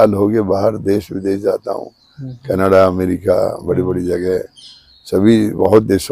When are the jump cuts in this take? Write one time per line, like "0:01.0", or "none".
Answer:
none